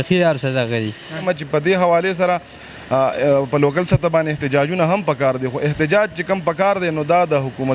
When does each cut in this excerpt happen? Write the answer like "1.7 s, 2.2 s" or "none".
1.2 s